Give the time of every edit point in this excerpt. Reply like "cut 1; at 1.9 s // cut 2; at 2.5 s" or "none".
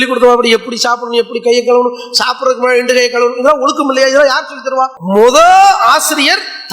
cut 1; at 5.0 s

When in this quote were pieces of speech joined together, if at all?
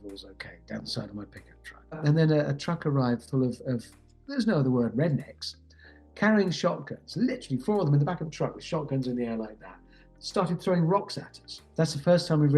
cut 1; at 2.0 s // cut 2; at 11.6 s

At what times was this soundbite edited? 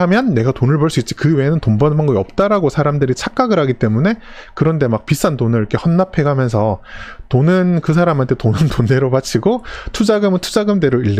none

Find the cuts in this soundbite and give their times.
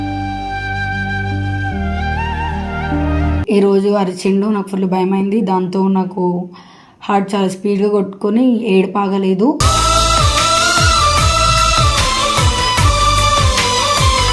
cut 1; at 3.4 s

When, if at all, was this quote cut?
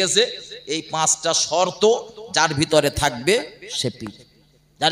none

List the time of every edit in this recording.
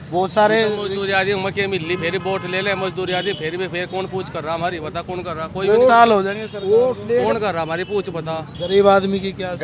cut 1; at 8.5 s

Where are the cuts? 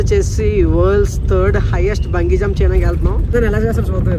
cut 1; at 3.2 s

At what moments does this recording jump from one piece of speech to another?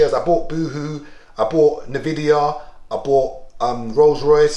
none

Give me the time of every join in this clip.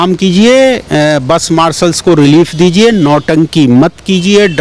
none

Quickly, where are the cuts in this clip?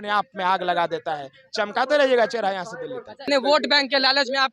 cut 1; at 3.2 s

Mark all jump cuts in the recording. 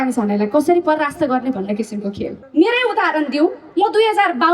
cut 1; at 2.4 s

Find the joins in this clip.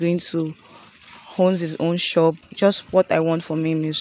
cut 1; at 2.4 s

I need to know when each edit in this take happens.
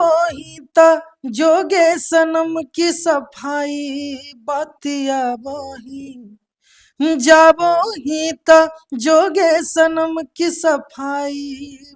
none

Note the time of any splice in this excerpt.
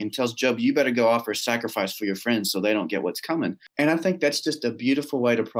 cut 1; at 3.6 s

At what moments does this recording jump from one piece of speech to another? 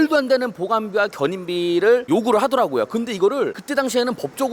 none

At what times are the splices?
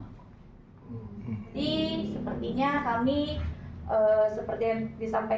cut 1; at 1.5 s

